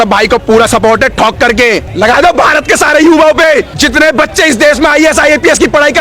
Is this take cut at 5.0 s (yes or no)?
no